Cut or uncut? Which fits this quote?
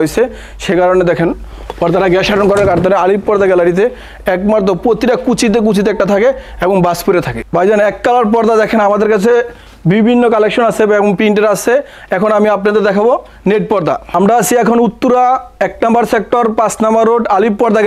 uncut